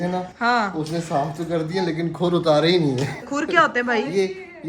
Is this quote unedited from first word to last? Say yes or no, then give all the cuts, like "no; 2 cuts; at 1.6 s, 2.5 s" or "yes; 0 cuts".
no; 1 cut; at 3.3 s